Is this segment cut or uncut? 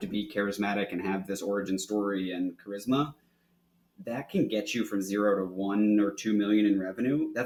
uncut